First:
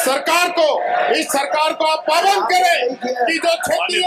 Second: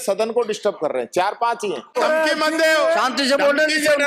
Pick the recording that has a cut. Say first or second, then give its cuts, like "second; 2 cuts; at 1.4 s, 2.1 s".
second; 1 cut; at 1.9 s